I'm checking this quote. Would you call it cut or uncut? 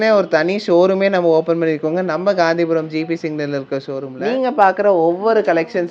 cut